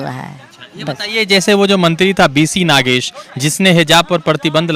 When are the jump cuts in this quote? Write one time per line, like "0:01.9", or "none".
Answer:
none